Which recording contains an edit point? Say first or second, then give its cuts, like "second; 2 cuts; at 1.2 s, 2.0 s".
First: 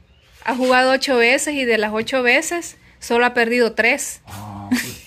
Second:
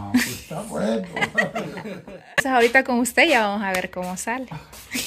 second; 1 cut; at 2.3 s